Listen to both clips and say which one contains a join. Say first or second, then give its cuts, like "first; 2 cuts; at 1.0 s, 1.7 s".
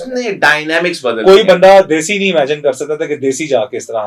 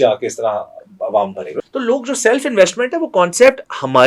second; 1 cut; at 1.5 s